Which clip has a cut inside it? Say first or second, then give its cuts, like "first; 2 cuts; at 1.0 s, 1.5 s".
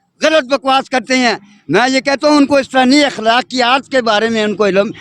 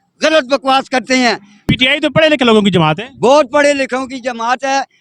second; 1 cut; at 1.6 s